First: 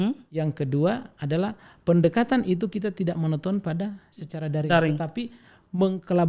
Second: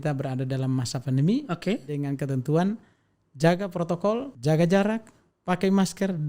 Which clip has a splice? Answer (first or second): second